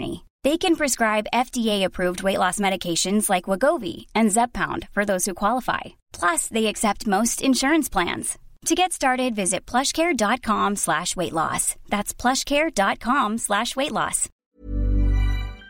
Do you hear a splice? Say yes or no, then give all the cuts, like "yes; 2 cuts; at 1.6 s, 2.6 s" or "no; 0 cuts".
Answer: yes; 1 cut; at 14.3 s